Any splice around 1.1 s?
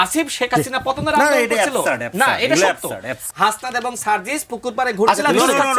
no; 1 cut; at 3.2 s

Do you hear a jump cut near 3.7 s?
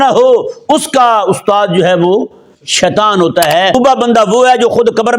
yes; 1 cut; at 3.7 s

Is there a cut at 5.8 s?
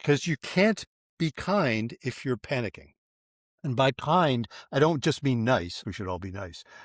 yes; 1 cut; at 5.8 s

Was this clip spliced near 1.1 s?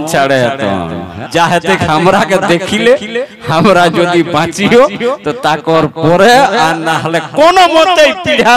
yes; 1 cut; at 1.1 s

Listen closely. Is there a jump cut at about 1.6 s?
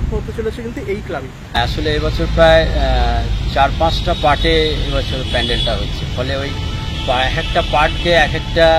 yes; 1 cut; at 1.6 s

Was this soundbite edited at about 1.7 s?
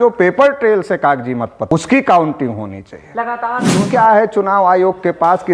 yes; 2 cuts; at 1.7 s, 3.9 s

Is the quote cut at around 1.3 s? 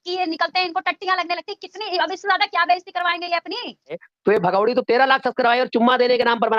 no; 1 cut; at 4.1 s

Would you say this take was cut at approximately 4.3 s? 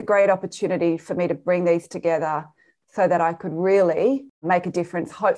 yes; 1 cut; at 4.3 s

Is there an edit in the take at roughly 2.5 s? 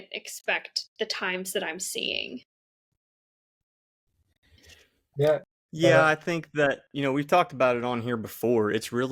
no; 0 cuts

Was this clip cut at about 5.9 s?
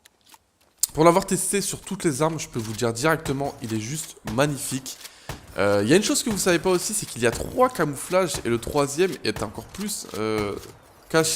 yes; 1 cut; at 5.9 s

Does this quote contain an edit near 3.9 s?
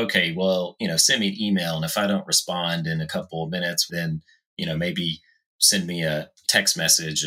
yes; 1 cut; at 3.9 s

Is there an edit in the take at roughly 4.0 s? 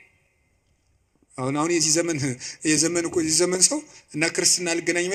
no; 0 cuts

